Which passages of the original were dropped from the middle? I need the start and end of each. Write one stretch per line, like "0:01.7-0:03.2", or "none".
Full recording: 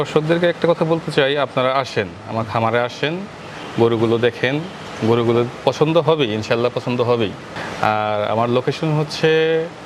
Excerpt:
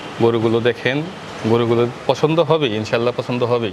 none